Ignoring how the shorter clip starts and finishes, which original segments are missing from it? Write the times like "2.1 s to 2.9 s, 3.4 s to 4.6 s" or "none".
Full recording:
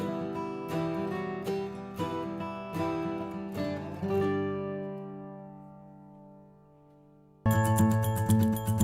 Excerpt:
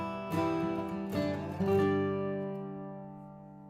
none

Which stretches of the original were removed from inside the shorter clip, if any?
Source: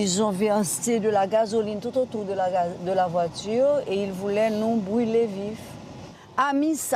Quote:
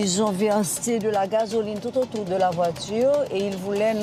2.2 s to 2.8 s

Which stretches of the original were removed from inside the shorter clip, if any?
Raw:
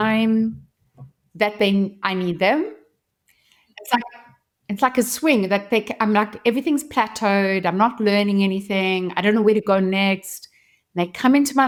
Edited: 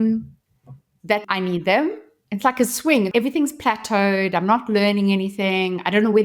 1.5 s to 2.0 s, 2.9 s to 4.5 s, 5.5 s to 6.4 s

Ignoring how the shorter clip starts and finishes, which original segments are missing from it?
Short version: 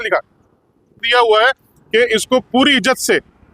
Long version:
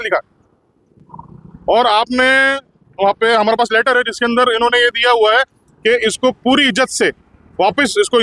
1.0 s to 5.0 s

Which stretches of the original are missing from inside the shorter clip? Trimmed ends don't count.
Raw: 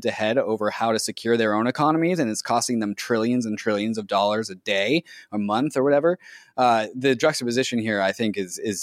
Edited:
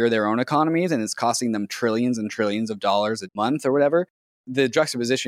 4.6 s to 5.4 s, 6.5 s to 6.9 s

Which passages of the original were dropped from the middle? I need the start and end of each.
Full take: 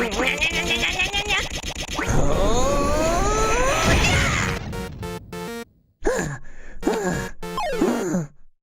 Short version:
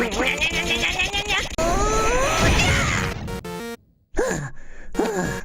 1.6 s to 3.0 s, 4.9 s to 5.3 s

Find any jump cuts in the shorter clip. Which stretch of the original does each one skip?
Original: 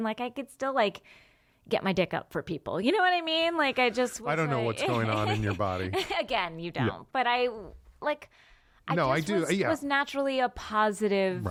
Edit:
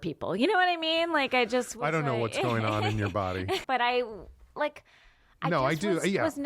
6.1 s to 7.1 s

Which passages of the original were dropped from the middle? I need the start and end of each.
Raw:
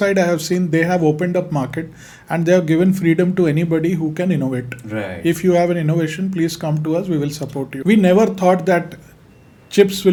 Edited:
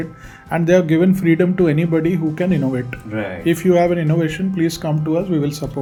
none

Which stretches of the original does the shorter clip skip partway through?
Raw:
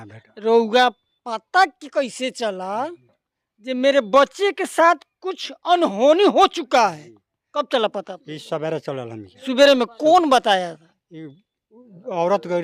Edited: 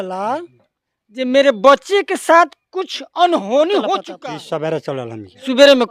6.6 s to 8.1 s

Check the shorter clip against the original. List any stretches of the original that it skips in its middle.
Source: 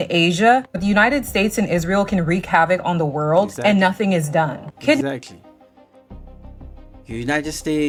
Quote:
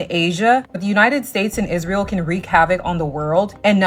none

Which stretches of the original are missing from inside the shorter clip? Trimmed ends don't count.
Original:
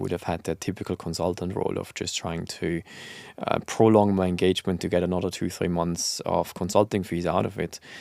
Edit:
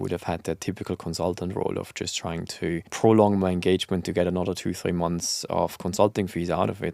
2.9 s to 3.7 s

